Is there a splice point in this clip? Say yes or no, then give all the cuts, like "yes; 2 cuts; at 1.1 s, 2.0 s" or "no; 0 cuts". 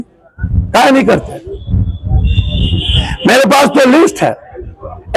no; 0 cuts